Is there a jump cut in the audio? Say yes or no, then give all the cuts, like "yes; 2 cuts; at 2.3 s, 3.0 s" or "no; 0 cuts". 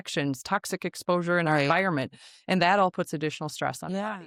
no; 0 cuts